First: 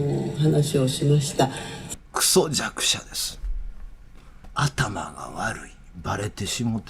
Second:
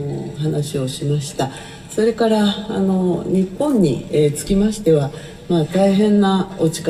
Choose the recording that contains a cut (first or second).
first